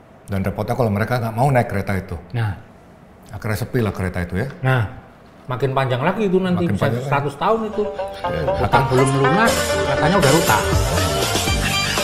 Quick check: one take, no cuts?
no; 2 cuts; at 2.4 s, 5.0 s

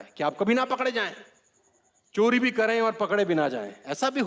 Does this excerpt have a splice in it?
no; 0 cuts

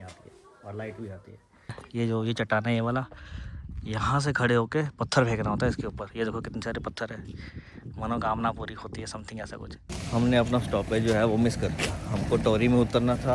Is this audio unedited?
no; 2 cuts; at 1.8 s, 9.9 s

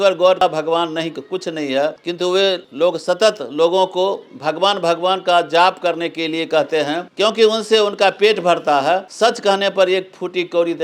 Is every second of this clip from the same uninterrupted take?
yes; 0 cuts

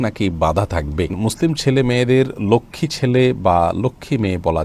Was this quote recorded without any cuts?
no; 1 cut; at 1.2 s

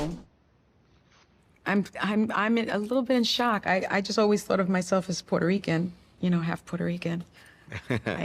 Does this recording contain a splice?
no; 0 cuts

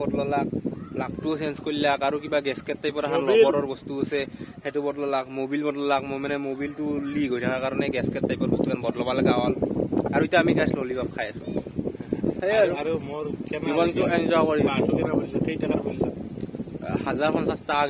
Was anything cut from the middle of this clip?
no; 0 cuts

